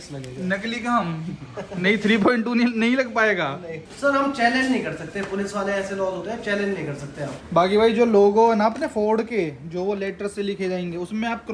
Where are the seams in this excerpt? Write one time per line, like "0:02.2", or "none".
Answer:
0:03.8
0:07.4